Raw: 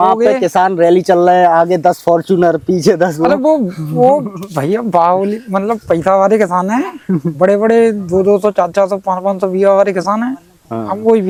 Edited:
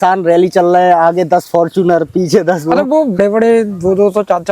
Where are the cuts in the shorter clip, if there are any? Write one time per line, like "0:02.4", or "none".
0:03.2